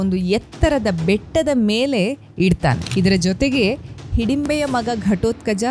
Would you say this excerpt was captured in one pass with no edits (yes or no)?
no